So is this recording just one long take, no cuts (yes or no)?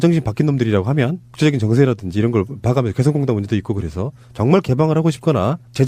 no